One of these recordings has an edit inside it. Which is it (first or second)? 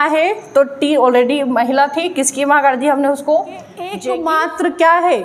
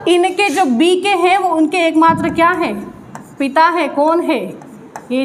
first